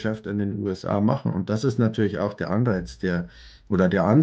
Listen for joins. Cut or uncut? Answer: uncut